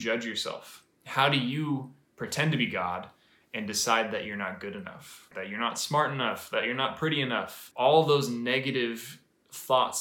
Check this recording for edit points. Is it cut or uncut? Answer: cut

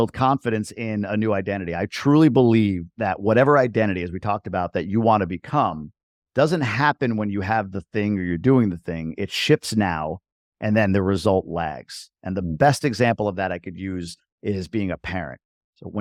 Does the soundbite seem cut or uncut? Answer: uncut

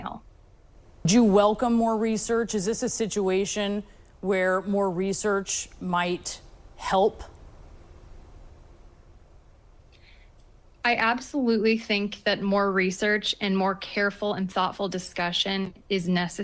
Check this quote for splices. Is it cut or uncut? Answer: cut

